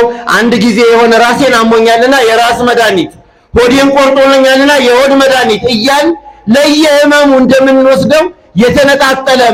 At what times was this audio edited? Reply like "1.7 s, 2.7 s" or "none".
none